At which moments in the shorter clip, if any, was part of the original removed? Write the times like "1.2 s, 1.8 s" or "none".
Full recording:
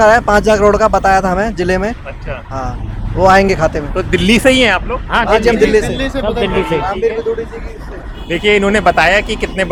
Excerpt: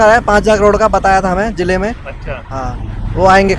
none